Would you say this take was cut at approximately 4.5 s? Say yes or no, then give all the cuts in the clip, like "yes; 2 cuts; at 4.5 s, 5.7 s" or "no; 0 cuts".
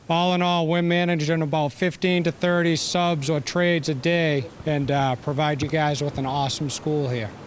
yes; 1 cut; at 4.5 s